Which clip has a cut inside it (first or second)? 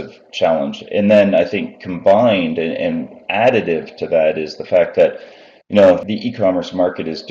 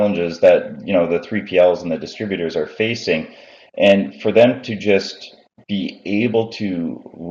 first